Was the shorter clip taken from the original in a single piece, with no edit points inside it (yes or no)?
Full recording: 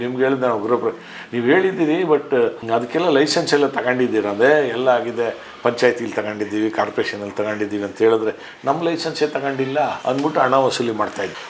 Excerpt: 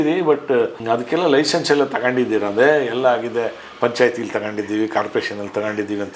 yes